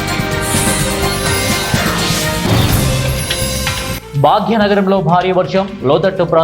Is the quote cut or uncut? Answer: cut